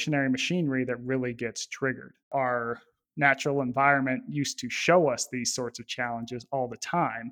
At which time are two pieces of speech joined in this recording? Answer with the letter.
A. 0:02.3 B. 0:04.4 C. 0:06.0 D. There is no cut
A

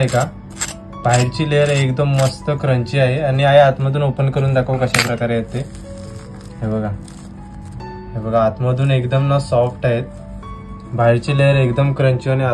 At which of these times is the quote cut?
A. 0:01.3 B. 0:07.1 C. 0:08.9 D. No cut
D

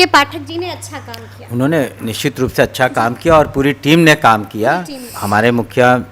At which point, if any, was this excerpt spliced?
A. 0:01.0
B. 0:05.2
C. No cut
B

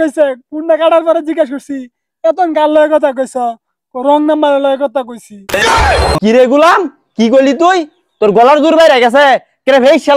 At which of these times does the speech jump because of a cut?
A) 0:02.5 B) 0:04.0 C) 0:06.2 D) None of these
C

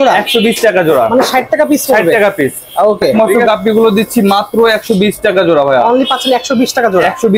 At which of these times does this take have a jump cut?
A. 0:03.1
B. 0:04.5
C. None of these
A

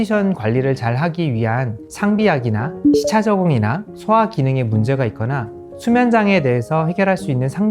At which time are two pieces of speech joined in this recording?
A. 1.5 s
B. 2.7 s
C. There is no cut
B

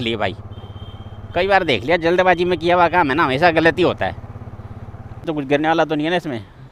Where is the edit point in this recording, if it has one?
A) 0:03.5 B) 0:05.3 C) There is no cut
B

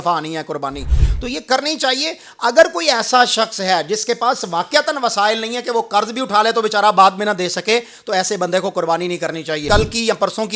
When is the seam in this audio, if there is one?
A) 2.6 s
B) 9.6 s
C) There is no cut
B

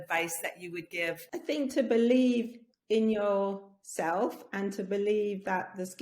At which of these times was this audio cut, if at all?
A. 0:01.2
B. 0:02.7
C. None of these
A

